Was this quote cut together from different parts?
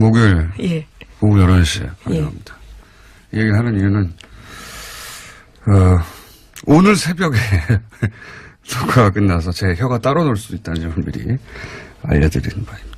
no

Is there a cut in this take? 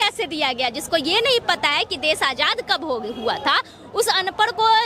no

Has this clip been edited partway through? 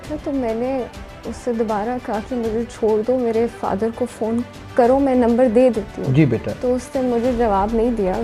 no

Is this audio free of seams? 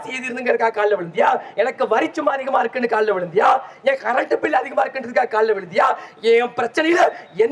yes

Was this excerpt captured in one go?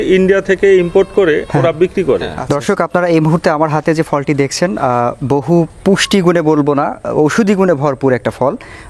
no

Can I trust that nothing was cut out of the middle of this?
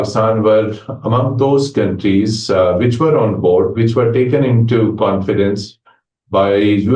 yes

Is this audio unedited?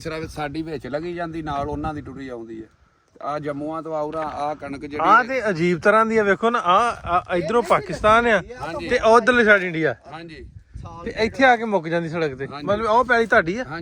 yes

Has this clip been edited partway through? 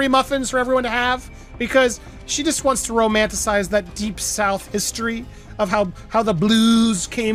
no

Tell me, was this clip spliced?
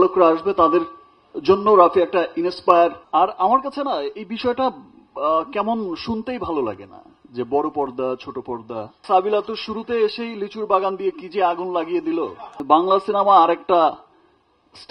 yes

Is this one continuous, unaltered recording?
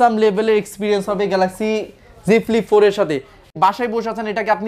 no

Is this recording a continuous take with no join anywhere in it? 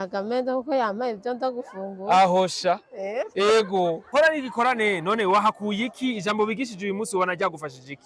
no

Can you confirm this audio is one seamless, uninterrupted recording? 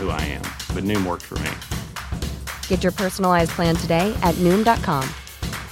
yes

